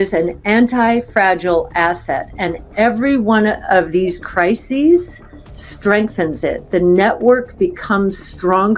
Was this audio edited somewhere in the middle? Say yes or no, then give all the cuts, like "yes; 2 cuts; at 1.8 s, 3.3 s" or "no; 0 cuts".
no; 0 cuts